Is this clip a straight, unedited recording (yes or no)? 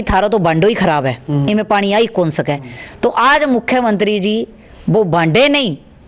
yes